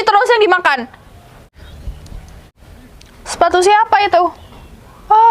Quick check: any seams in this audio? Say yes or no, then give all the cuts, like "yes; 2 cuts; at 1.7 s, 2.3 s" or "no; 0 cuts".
yes; 2 cuts; at 1.5 s, 2.5 s